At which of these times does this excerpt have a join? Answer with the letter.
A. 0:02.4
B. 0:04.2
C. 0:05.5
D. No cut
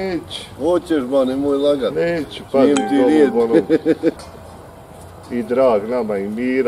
B